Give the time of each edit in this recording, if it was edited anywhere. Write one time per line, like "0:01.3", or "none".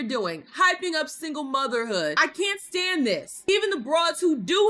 0:02.1